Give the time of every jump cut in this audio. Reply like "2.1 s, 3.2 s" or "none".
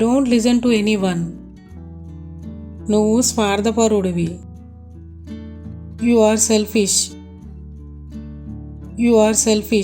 1.3 s, 2.8 s, 4.4 s, 5.9 s, 7.1 s, 8.9 s